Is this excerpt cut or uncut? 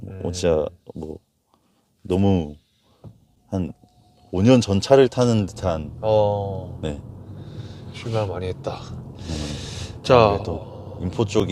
uncut